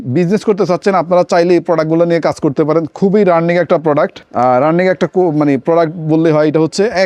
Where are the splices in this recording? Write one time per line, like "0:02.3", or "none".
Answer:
none